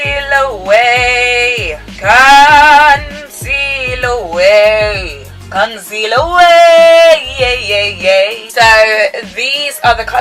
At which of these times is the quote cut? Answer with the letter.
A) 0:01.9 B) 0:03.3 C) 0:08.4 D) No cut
C